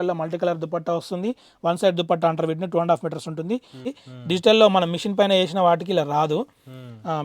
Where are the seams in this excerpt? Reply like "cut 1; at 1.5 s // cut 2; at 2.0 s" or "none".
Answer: cut 1; at 3.9 s